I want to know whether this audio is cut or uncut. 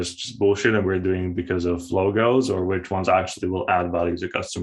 uncut